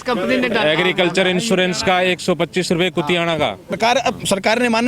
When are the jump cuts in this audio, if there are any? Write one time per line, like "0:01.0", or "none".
0:03.8

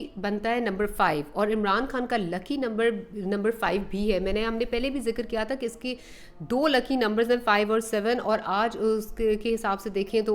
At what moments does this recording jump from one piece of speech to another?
none

